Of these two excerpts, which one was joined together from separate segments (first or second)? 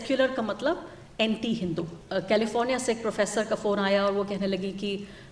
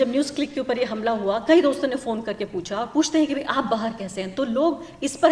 first